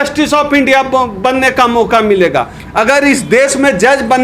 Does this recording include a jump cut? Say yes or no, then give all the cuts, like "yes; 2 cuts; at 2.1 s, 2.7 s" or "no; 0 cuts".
yes; 1 cut; at 2.6 s